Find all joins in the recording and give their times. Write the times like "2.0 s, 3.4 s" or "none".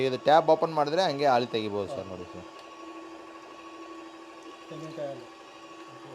2.5 s

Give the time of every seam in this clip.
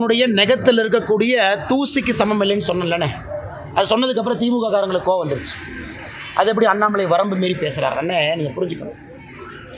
none

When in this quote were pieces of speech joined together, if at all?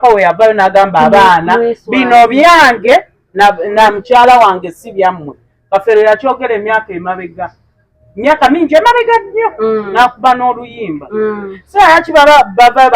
none

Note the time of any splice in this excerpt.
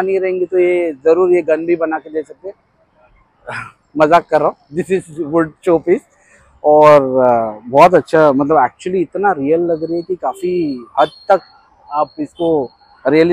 none

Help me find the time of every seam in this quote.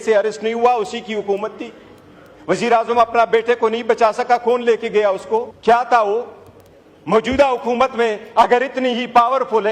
5.5 s

